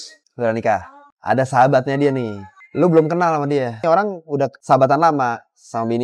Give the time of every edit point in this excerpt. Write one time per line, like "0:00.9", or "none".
0:01.0
0:03.8